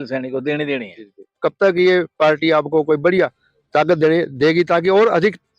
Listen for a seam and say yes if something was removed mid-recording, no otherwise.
yes